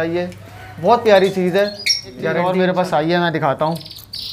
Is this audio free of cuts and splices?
no; 1 cut; at 2.4 s

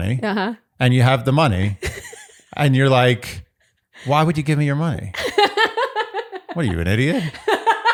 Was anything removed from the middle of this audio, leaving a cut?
no; 0 cuts

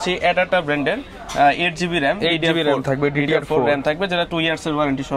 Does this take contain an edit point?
no; 0 cuts

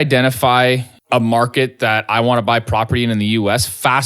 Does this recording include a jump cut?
yes; 1 cut; at 0.9 s

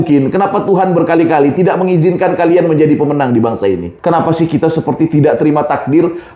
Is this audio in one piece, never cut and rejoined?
no; 1 cut; at 3.9 s

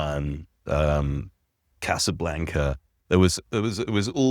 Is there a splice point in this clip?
no; 0 cuts

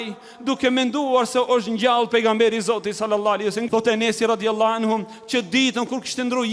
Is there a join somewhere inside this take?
yes; 1 cut; at 3.6 s

